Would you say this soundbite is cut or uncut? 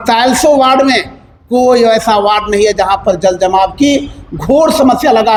uncut